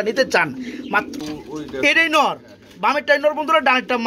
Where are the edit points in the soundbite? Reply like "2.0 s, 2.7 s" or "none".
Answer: 1.1 s

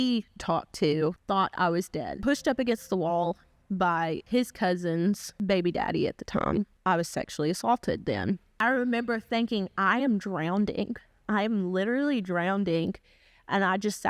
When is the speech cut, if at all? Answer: 1.2 s, 2.2 s, 4.2 s, 5.3 s, 6.6 s, 8.5 s

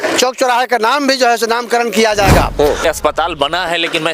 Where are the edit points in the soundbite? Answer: 2.8 s

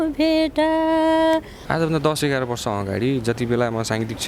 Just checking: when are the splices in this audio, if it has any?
1.6 s

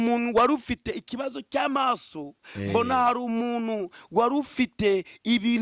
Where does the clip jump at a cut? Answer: none

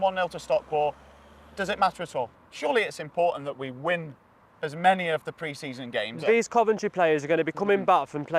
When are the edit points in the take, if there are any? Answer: 2.4 s, 6.2 s

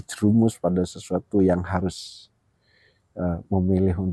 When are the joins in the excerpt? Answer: none

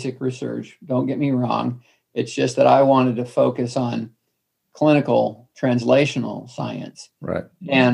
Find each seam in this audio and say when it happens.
none

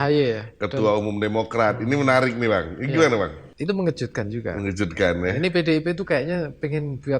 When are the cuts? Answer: 3.5 s

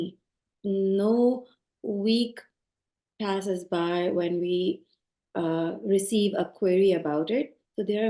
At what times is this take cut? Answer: none

